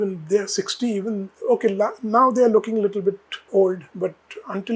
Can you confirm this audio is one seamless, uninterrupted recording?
no; 2 cuts; at 1.3 s, 3.3 s

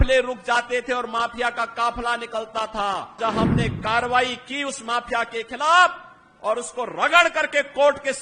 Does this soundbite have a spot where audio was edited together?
yes; 1 cut; at 3.2 s

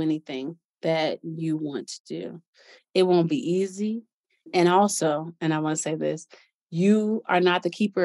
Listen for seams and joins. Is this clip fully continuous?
no; 1 cut; at 4.5 s

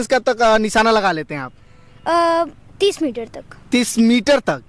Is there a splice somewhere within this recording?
no; 0 cuts

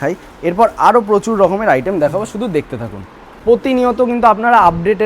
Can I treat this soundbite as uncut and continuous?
no; 1 cut; at 3.4 s

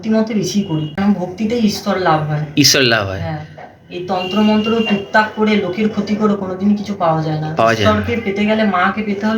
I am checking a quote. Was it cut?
yes; 1 cut; at 1.0 s

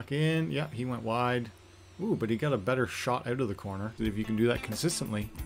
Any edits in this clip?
yes; 1 cut; at 3.9 s

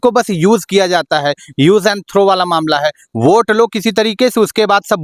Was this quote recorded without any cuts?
yes; 0 cuts

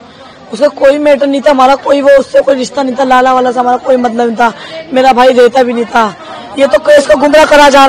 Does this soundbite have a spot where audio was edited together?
no; 0 cuts

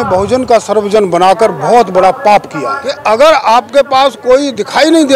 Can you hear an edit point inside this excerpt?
yes; 1 cut; at 2.9 s

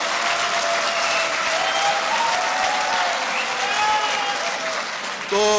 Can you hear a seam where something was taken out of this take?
no; 0 cuts

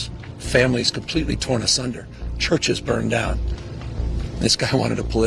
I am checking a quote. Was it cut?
no; 0 cuts

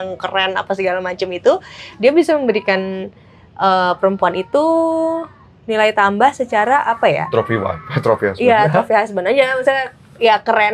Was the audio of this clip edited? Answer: no; 0 cuts

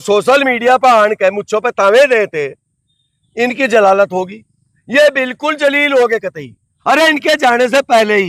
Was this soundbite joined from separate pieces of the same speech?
no; 0 cuts

